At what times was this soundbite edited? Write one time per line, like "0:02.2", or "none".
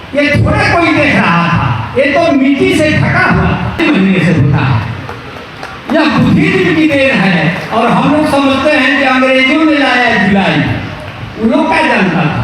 0:03.8